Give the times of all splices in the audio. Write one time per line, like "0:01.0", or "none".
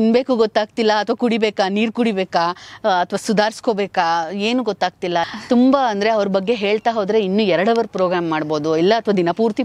0:05.2